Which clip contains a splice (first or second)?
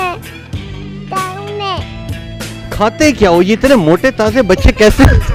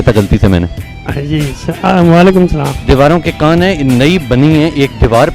second